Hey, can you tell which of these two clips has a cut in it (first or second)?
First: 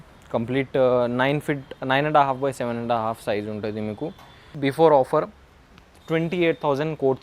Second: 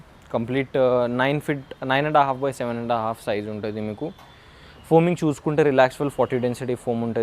first